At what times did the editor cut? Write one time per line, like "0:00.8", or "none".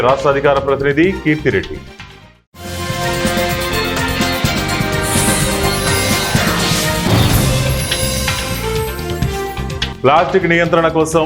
none